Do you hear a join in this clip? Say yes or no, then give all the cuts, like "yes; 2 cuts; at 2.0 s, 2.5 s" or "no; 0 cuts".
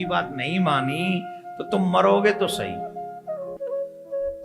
yes; 1 cut; at 3.5 s